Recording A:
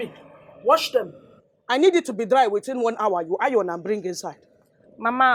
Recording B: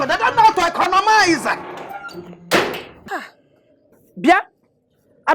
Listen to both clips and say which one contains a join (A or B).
B